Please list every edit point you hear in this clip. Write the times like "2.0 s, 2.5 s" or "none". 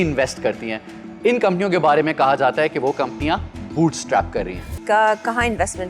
4.8 s